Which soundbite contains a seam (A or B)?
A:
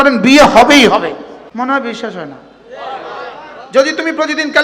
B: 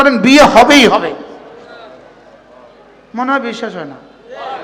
A